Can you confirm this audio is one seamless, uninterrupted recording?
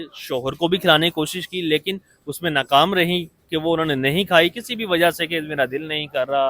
yes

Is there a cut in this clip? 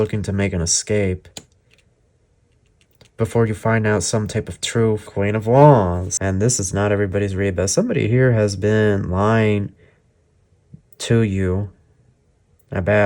yes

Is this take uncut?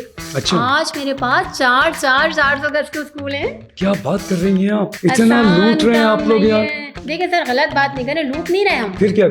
yes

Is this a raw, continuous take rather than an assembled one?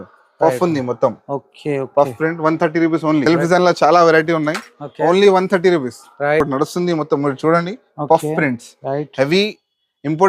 no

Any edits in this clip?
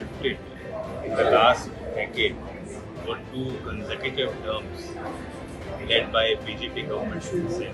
no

